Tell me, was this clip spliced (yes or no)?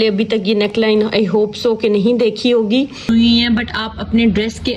yes